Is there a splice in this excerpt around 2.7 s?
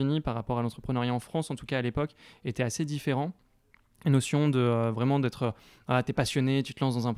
no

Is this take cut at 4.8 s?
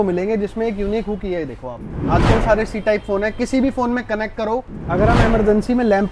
yes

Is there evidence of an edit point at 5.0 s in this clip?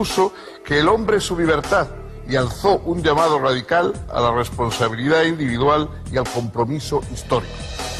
yes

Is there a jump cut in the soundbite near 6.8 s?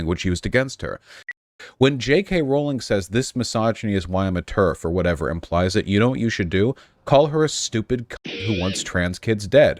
no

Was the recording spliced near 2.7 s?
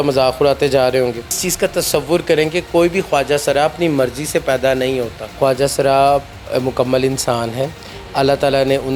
no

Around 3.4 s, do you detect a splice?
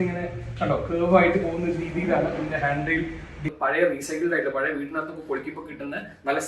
yes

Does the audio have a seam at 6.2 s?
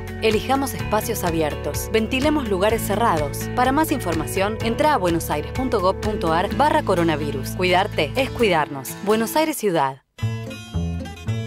no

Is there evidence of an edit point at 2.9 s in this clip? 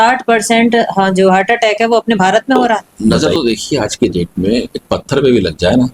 yes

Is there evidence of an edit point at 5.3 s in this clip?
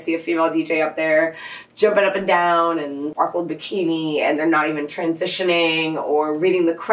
no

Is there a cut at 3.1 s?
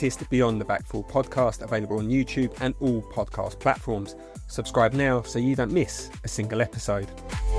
no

